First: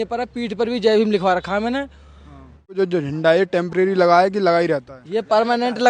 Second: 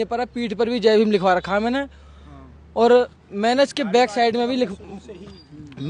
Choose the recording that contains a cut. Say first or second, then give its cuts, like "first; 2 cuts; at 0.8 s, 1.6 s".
first; 1 cut; at 2.7 s